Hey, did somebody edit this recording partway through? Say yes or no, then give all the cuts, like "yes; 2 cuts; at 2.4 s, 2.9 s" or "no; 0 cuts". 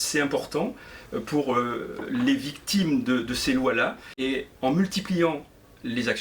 yes; 1 cut; at 4.1 s